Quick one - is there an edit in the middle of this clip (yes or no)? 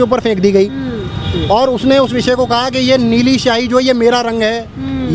no